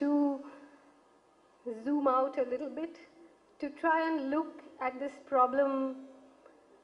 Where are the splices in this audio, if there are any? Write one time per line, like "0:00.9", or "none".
none